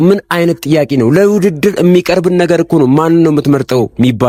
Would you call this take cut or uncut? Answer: uncut